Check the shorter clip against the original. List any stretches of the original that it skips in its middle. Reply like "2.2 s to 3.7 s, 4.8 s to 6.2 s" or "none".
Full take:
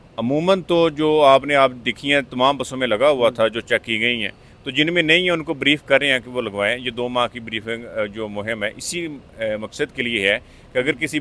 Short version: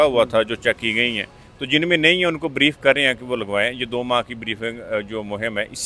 none

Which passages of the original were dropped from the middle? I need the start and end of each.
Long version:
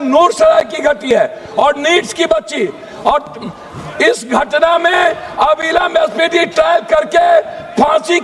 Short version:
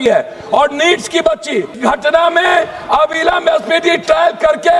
2.8 s to 4.2 s

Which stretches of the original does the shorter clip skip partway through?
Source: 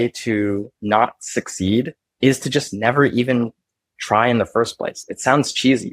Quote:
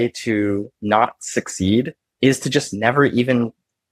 none

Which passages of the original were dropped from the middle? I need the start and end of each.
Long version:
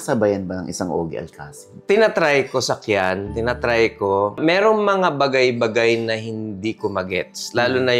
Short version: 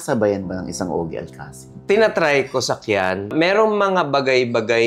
3.3 s to 4.3 s

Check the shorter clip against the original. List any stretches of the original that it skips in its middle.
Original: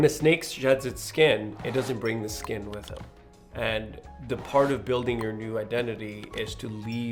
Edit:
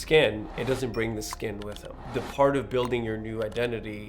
3.0 s to 4.1 s

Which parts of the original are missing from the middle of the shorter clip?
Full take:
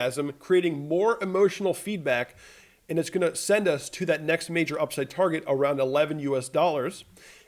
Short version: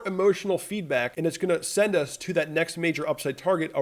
2.3 s to 2.8 s

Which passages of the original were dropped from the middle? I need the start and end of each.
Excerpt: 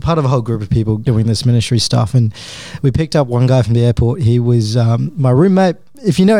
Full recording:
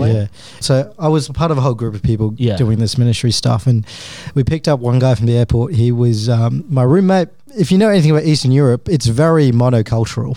2.4 s to 2.6 s

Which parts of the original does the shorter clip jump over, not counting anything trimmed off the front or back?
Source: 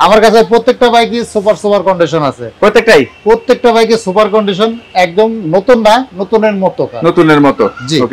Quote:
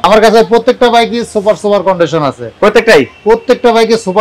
none

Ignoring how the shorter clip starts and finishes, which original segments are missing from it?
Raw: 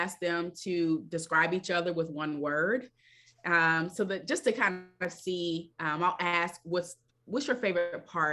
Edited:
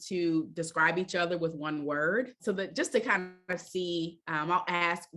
2.9 s to 3.9 s

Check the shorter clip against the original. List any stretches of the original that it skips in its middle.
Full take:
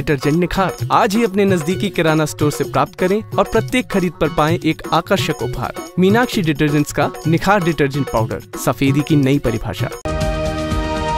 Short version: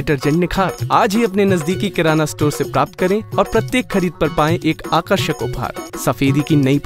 5.8 s to 8.4 s

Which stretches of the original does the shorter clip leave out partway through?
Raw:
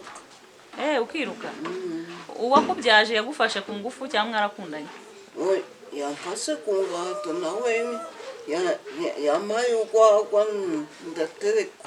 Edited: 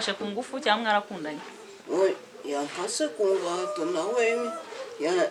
none

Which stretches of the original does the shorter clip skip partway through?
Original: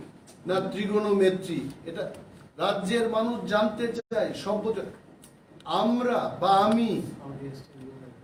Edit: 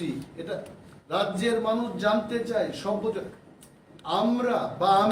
4.0 s to 4.1 s

